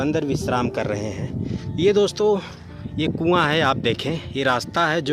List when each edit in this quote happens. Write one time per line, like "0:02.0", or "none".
none